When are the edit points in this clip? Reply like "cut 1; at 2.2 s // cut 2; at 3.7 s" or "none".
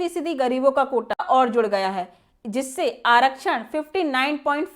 cut 1; at 1.2 s